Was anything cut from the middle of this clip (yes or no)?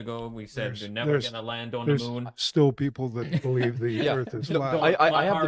no